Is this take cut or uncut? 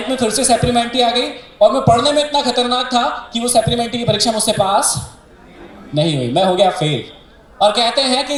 uncut